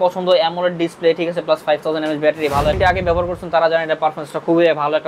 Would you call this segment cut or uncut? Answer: cut